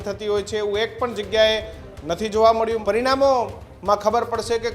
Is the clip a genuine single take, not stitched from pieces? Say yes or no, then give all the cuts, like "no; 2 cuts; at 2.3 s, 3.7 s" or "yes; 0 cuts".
no; 1 cut; at 2.8 s